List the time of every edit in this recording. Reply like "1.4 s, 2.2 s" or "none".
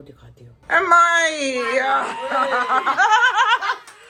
none